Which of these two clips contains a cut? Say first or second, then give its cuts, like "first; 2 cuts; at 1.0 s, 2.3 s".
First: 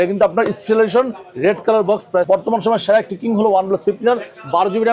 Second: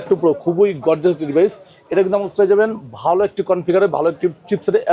first; 1 cut; at 2.3 s